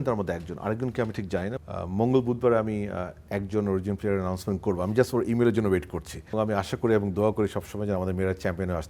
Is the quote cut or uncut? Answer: cut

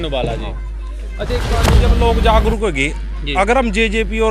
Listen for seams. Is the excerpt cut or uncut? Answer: cut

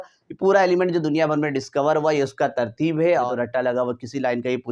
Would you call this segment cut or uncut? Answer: cut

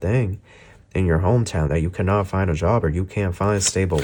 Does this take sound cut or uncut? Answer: uncut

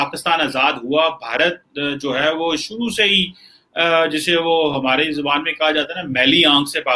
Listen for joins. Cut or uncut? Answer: uncut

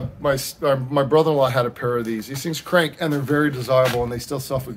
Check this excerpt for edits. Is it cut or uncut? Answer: uncut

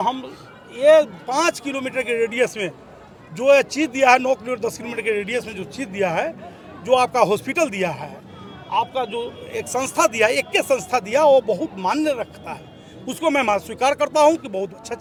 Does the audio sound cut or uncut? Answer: uncut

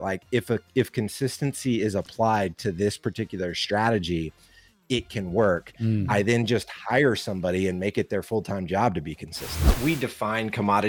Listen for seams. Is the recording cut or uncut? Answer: cut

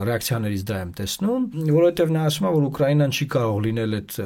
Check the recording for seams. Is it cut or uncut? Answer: uncut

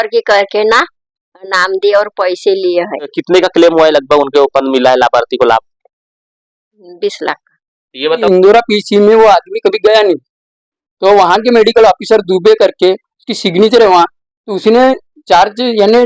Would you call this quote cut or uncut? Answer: cut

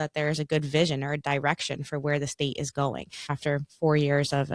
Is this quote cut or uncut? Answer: cut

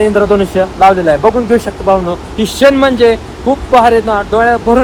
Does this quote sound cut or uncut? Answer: uncut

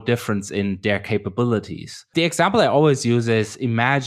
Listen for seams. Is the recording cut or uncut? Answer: cut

